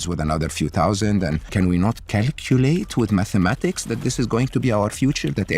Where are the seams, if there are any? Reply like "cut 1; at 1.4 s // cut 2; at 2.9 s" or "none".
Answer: none